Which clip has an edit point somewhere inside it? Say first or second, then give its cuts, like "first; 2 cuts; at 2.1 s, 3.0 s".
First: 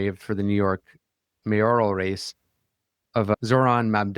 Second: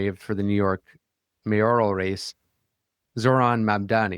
second; 1 cut; at 3.1 s